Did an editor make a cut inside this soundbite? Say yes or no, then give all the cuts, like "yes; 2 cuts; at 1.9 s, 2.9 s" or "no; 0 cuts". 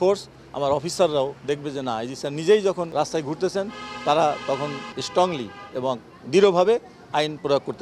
yes; 2 cuts; at 2.9 s, 5.0 s